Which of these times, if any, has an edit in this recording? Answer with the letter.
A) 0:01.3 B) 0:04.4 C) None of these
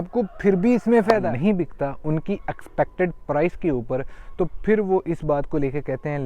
A